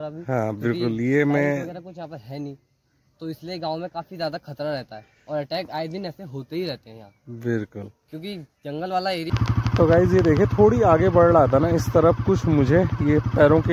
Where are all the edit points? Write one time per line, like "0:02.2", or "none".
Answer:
0:09.3